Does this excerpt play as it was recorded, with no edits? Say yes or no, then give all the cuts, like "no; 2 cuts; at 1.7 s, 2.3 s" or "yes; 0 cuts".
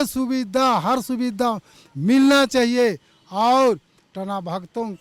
yes; 0 cuts